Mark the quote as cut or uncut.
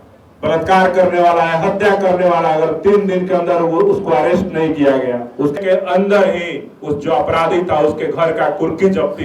cut